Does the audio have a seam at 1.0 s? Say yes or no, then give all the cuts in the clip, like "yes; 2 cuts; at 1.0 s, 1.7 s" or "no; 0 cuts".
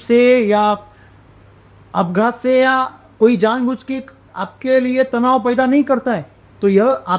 no; 0 cuts